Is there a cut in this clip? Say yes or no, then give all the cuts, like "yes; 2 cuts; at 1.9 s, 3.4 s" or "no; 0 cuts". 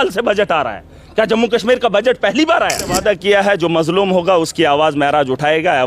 yes; 1 cut; at 2.9 s